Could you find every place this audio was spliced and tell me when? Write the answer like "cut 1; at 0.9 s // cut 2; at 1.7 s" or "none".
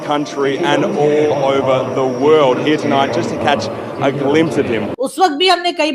cut 1; at 4.9 s